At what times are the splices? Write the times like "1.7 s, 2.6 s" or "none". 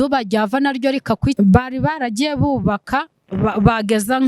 1.3 s